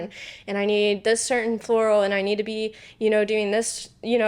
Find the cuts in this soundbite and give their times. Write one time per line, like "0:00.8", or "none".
none